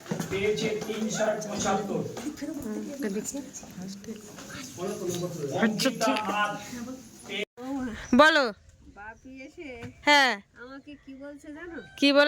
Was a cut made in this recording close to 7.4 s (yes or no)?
yes